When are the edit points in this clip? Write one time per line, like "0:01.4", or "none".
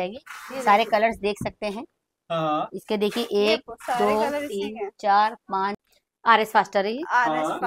0:05.8